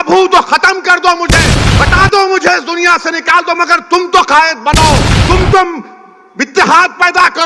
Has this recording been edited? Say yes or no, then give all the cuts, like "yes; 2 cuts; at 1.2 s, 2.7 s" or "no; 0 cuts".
yes; 2 cuts; at 1.6 s, 5.1 s